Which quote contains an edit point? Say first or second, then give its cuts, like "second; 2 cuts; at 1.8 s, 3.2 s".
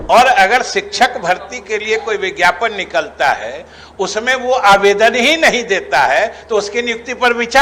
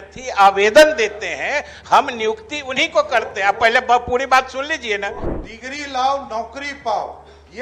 second; 1 cut; at 5.2 s